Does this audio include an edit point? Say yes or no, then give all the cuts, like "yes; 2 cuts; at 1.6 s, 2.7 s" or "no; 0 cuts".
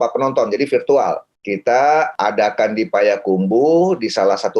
yes; 2 cuts; at 1.3 s, 2.1 s